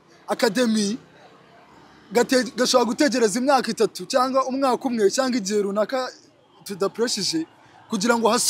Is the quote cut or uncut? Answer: uncut